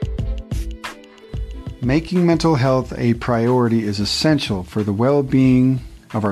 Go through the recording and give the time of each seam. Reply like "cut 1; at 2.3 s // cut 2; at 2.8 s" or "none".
cut 1; at 1.8 s